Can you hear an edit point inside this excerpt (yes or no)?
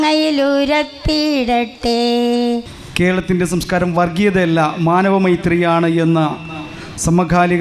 yes